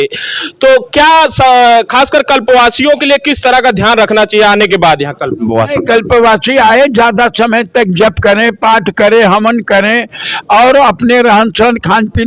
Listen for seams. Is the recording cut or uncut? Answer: uncut